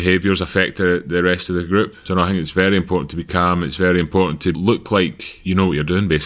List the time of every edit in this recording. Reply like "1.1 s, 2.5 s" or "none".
2.0 s, 4.5 s, 5.3 s